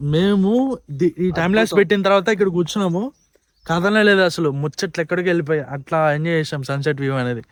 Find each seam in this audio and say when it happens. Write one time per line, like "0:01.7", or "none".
none